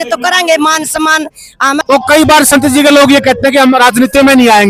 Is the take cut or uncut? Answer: cut